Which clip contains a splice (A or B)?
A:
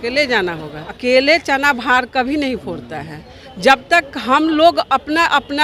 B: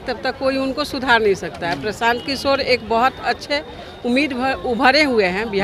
A